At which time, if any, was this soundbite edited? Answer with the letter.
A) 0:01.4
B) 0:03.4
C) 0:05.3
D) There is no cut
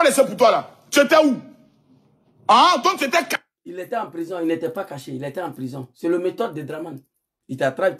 D